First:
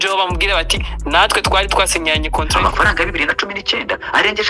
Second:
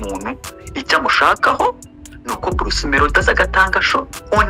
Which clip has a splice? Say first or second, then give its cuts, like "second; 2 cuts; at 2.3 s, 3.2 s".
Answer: first; 1 cut; at 2.5 s